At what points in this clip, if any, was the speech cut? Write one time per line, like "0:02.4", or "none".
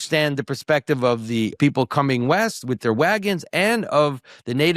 0:01.6